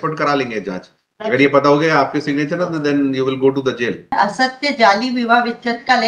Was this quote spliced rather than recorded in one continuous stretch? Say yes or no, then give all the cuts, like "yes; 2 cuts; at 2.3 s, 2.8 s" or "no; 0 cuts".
yes; 1 cut; at 4.1 s